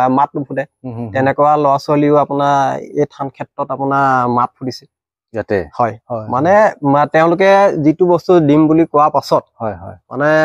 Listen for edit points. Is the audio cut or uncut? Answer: uncut